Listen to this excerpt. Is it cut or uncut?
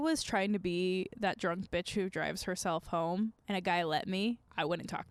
uncut